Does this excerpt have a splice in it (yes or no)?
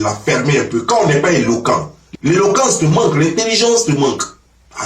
yes